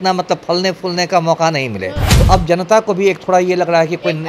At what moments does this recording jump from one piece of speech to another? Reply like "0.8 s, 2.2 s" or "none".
2.2 s